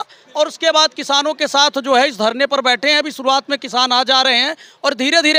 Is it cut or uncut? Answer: uncut